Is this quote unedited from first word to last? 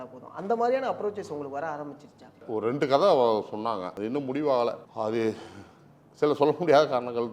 no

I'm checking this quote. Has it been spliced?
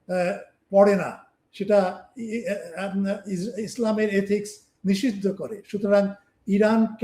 no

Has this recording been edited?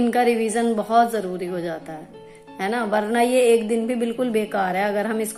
no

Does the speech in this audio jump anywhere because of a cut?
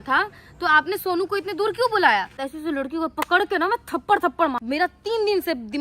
yes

